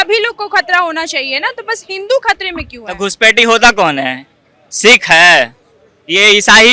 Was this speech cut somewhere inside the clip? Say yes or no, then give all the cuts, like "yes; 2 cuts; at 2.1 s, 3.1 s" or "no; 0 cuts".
no; 0 cuts